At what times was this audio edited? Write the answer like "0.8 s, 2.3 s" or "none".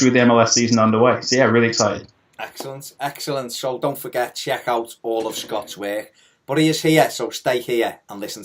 2.2 s